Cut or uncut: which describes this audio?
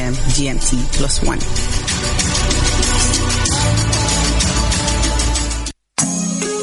uncut